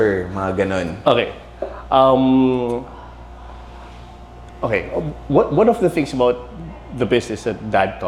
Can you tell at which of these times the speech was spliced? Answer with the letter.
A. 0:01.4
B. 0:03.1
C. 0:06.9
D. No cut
D